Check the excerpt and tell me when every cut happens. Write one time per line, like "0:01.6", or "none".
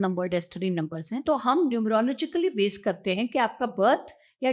0:01.2

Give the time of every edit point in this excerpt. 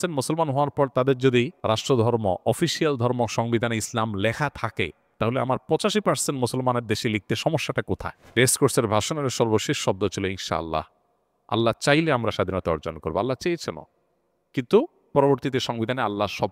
0:01.6
0:05.0
0:08.2

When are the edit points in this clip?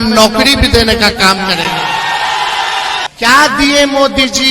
0:03.0

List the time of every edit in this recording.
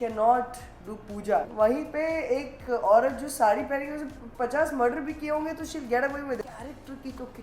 0:01.5
0:06.4

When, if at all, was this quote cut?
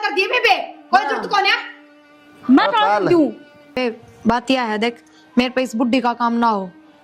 0:03.8

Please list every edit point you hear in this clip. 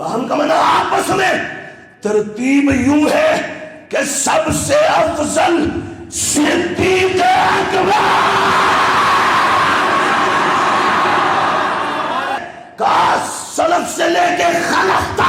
0:12.4

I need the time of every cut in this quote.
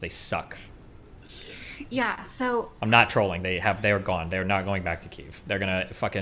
none

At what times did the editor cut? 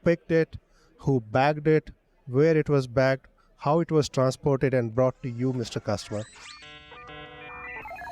0:06.6

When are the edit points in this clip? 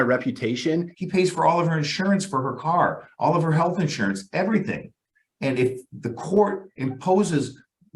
0:00.9

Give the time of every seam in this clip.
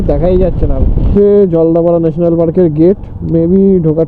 0:01.0

